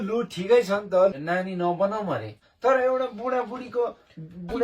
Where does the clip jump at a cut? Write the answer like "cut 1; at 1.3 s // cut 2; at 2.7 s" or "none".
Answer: cut 1; at 1.2 s // cut 2; at 2.4 s